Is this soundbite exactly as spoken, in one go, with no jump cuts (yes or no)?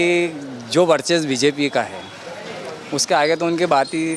yes